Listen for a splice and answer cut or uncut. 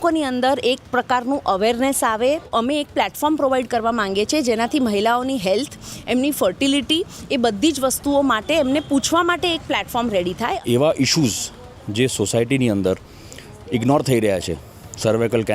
cut